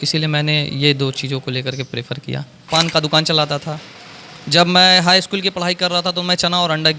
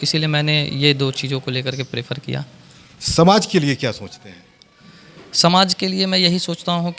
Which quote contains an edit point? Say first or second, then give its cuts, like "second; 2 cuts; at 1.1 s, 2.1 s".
first; 1 cut; at 2.7 s